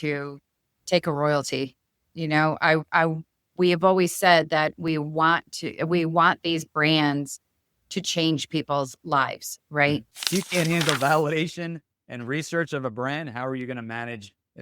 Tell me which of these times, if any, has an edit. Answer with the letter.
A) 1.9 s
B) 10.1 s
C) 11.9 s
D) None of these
B